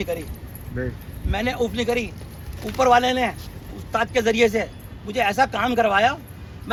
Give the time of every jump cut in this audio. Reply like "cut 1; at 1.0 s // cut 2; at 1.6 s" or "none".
none